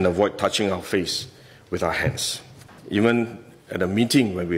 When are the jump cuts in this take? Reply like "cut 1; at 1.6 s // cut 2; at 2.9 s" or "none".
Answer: cut 1; at 2.7 s